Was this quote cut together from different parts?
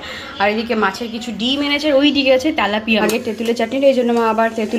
yes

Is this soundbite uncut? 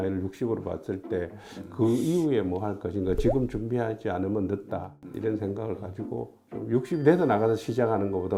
yes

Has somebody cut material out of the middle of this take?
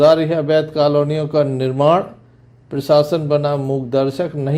no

